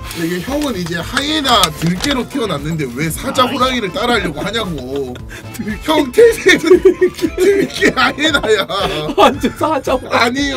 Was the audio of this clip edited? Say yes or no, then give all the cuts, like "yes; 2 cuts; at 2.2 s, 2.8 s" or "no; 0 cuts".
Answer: no; 0 cuts